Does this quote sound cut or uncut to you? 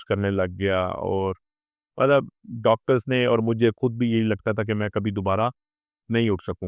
uncut